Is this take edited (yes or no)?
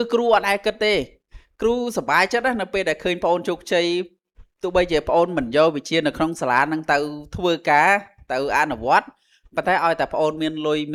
no